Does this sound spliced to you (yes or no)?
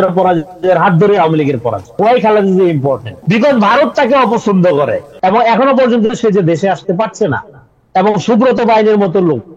yes